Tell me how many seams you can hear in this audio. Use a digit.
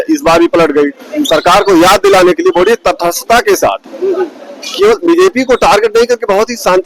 0